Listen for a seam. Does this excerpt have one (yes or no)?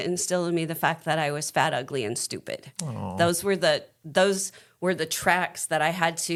no